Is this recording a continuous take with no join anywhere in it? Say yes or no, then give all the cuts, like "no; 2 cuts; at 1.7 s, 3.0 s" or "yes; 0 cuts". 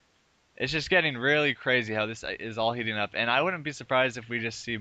no; 1 cut; at 1.7 s